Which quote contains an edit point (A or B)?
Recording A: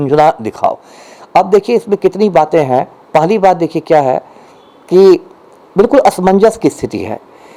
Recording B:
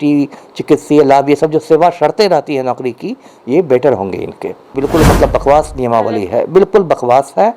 B